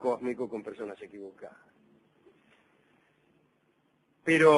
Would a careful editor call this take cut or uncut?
uncut